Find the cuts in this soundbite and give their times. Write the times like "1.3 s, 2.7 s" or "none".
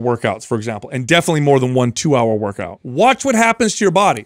2.8 s